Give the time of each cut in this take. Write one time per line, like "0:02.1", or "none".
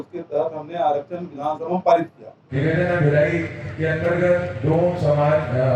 0:02.4